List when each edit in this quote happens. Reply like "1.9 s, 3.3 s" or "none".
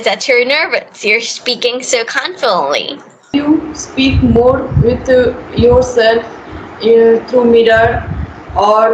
3.3 s